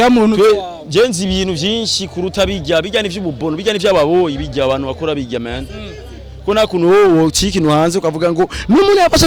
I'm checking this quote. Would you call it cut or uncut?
uncut